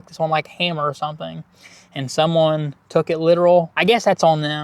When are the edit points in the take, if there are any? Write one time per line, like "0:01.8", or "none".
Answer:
0:03.7